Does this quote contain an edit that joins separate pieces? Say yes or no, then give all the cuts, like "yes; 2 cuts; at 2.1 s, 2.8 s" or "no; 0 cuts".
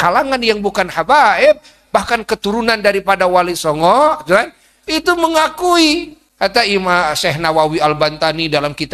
yes; 1 cut; at 6.2 s